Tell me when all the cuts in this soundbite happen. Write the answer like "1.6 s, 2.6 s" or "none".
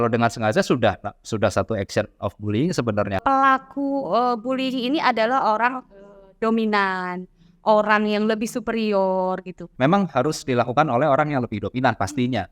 3.2 s, 9.7 s

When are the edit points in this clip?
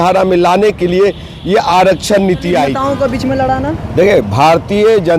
2.8 s

